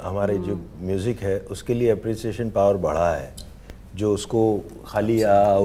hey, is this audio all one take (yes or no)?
yes